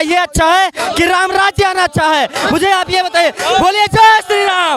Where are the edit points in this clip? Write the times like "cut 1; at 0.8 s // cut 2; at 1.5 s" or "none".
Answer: none